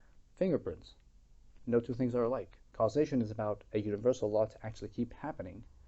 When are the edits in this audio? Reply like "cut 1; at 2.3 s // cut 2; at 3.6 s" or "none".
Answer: cut 1; at 2.6 s